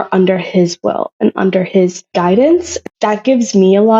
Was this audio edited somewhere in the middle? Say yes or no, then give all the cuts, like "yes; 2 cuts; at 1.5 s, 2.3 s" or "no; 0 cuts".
yes; 2 cuts; at 2.0 s, 2.7 s